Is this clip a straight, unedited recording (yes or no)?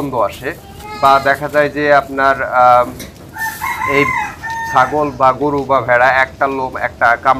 yes